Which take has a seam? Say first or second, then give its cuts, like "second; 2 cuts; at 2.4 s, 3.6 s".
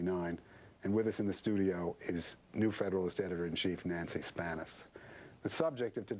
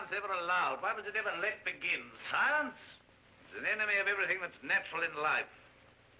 first; 1 cut; at 3.1 s